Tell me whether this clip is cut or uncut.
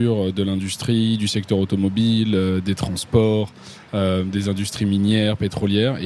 uncut